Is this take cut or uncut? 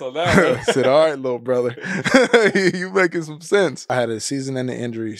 cut